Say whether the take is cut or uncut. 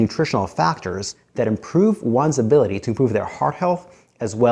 uncut